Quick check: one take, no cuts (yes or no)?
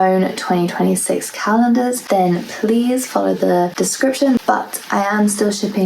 no